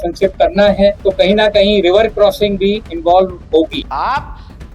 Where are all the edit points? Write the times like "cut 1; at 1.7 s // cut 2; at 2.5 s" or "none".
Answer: cut 1; at 1.0 s // cut 2; at 2.9 s // cut 3; at 3.8 s